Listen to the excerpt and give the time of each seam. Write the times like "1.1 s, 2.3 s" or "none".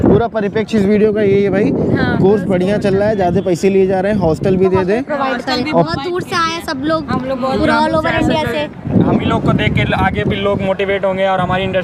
none

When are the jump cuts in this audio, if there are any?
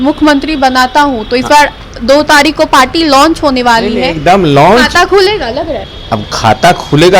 none

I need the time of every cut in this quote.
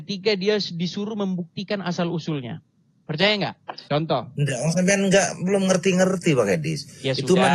none

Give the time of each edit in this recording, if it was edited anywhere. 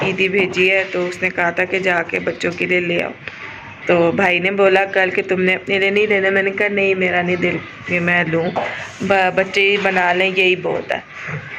none

